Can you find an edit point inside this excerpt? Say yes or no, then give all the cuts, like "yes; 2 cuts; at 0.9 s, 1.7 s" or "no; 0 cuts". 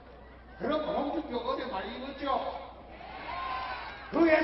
yes; 1 cut; at 2.6 s